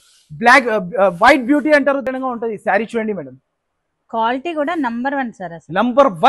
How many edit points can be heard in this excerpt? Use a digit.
1